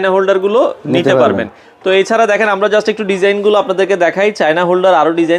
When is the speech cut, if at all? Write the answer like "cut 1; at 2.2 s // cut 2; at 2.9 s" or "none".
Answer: none